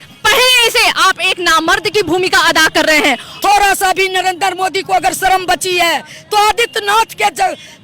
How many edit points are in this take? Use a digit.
1